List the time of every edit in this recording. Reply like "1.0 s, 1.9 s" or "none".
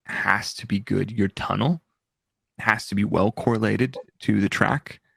none